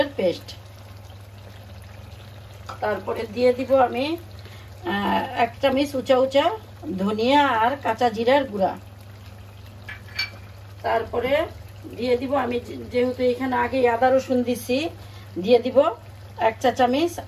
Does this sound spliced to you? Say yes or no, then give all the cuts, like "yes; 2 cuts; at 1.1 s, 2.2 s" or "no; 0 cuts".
no; 0 cuts